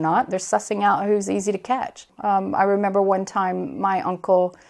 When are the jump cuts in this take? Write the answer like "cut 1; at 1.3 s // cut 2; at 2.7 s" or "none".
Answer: cut 1; at 2.1 s